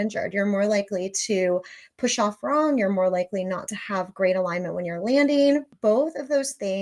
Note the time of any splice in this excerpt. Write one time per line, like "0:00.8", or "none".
0:05.7